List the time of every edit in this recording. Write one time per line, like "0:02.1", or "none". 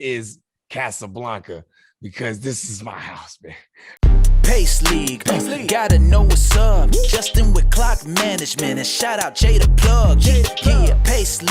0:03.8